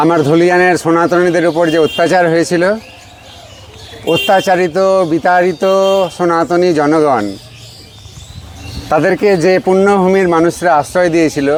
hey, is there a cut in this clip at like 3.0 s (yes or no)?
no